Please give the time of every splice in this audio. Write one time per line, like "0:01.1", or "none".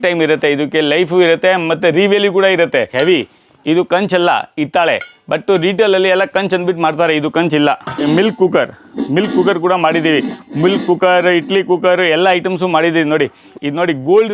0:02.9
0:08.0
0:13.4

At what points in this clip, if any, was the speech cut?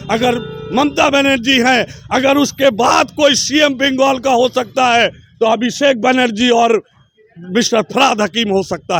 none

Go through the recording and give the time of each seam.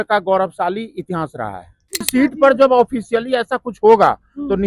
0:02.1

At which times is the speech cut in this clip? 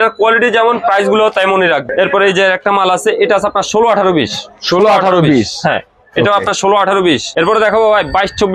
0:01.8
0:07.4

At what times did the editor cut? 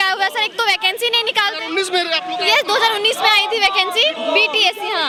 none

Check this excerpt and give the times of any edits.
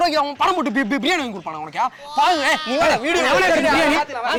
none

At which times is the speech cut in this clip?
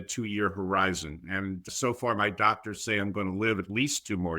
0:01.7

